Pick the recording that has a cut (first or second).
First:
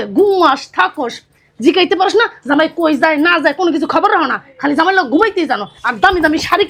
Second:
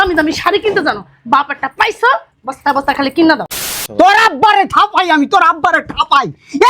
second